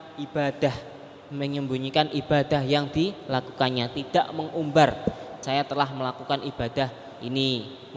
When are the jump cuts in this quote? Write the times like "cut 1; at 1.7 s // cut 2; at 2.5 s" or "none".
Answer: cut 1; at 5.3 s

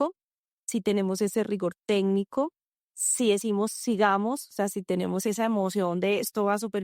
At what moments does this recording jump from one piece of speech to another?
cut 1; at 3.1 s // cut 2; at 5.3 s

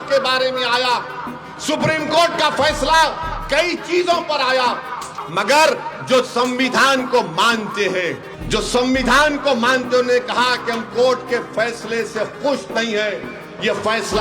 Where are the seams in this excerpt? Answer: cut 1; at 5.1 s // cut 2; at 8.3 s

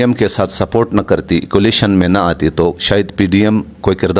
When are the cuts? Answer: none

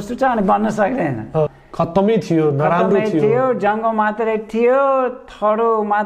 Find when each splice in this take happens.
cut 1; at 1.5 s

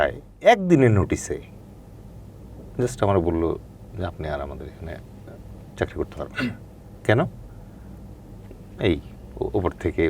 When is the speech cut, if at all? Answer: none

